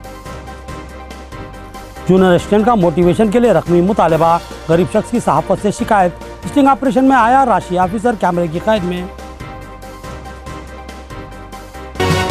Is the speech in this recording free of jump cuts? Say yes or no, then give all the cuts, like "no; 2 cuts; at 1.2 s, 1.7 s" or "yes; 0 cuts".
yes; 0 cuts